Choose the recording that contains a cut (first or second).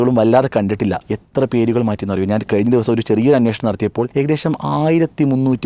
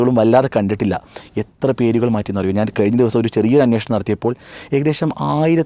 first